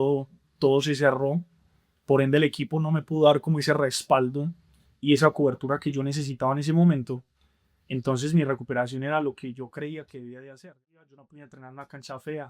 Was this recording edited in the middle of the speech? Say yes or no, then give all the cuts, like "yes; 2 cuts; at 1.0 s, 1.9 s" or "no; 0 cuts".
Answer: yes; 1 cut; at 10.8 s